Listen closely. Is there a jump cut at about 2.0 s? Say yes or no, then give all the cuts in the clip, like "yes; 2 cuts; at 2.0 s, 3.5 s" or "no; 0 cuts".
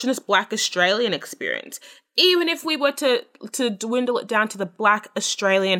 no; 0 cuts